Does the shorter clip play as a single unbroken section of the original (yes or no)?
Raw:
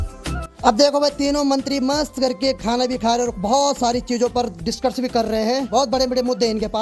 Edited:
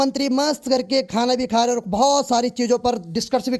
yes